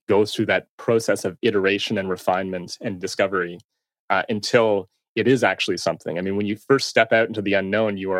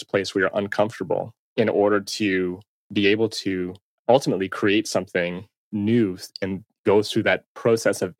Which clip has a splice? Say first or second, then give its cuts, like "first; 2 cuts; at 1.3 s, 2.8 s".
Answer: second; 3 cuts; at 1.4 s, 3.8 s, 5.7 s